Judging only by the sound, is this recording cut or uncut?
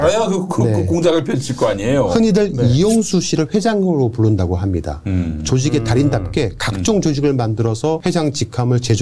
cut